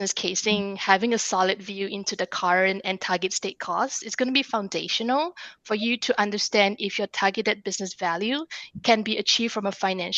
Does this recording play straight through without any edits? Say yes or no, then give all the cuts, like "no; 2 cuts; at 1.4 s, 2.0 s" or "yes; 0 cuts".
yes; 0 cuts